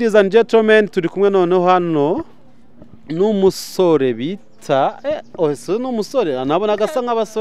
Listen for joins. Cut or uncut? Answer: uncut